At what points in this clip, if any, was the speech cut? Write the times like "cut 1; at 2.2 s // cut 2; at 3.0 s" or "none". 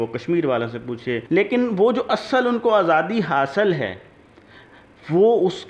cut 1; at 1.2 s